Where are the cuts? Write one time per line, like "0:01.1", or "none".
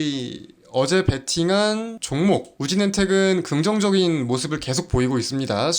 0:02.0
0:02.5